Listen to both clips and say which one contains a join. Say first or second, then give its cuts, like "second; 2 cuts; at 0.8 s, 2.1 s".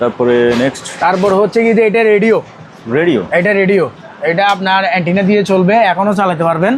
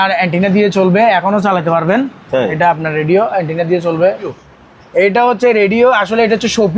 second; 1 cut; at 4.4 s